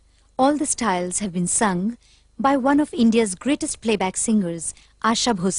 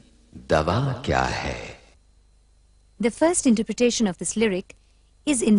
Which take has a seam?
first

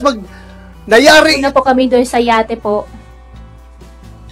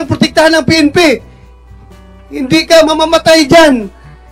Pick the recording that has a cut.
first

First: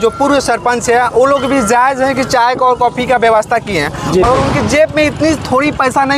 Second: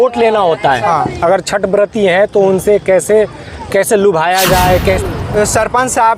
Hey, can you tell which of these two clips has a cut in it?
second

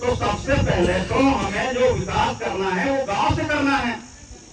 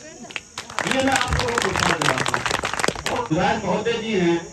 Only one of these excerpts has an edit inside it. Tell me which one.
second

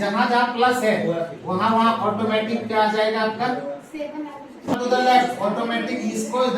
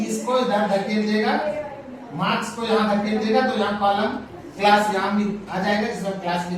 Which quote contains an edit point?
first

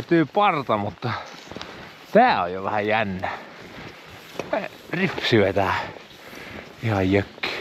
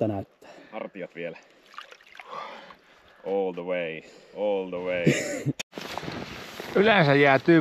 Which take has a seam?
second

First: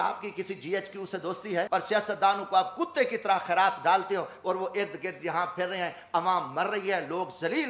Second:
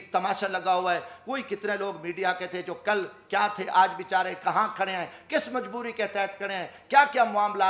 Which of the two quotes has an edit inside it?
first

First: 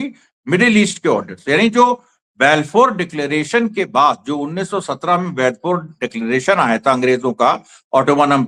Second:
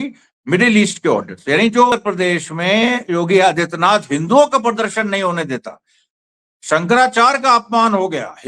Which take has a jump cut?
second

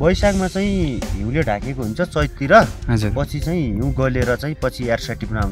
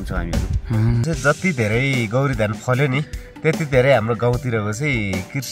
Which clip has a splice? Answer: second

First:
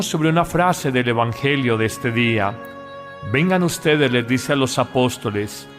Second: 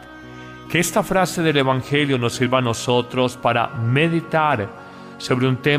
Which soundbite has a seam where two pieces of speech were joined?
first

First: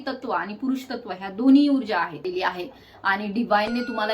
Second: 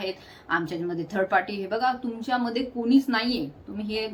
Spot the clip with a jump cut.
first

